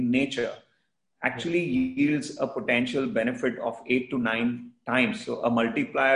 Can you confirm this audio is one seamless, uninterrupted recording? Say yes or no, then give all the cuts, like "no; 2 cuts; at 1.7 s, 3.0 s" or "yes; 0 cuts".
yes; 0 cuts